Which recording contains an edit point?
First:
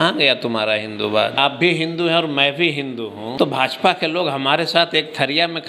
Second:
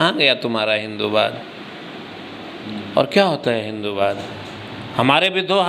first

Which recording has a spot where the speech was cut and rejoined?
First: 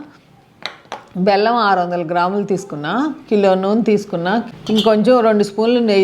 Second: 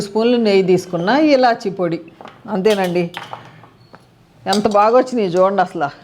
first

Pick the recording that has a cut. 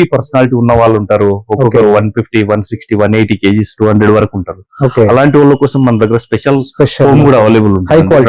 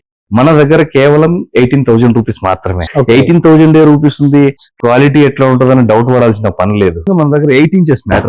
second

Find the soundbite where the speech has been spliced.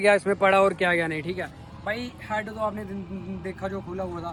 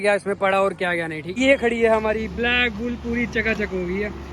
second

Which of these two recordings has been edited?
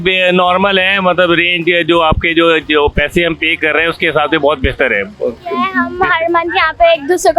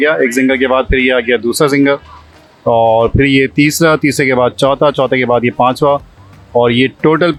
first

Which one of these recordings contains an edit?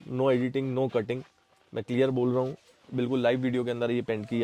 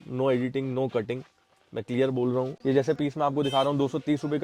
second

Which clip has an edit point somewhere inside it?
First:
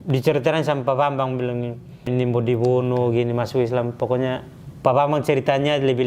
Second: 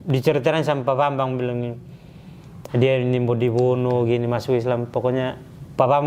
first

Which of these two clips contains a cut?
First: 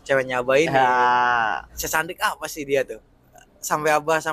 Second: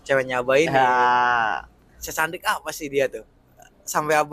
first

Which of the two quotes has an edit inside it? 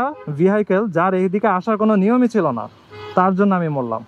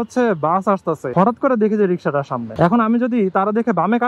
second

